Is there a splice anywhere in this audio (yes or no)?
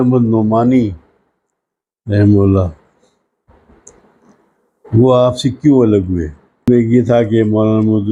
yes